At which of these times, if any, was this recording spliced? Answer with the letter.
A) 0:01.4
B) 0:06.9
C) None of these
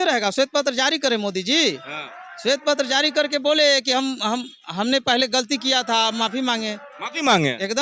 C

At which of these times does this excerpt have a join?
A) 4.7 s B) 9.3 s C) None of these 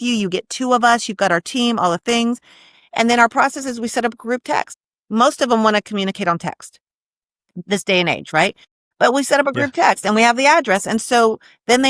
A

